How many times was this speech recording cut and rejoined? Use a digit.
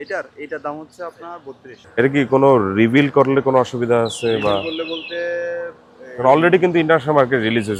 0